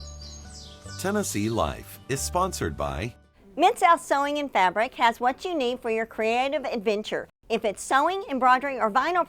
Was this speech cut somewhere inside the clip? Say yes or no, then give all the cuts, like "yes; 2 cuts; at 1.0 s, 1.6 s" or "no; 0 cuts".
yes; 1 cut; at 0.9 s